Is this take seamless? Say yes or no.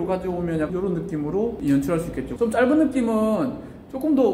no